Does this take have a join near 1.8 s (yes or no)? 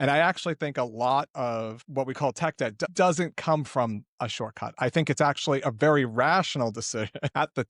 yes